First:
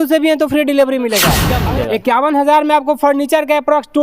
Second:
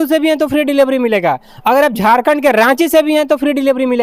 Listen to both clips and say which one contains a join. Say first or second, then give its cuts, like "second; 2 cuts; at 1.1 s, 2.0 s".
first; 1 cut; at 1.5 s